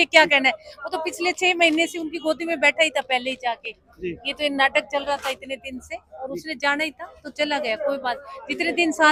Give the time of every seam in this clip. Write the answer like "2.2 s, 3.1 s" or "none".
none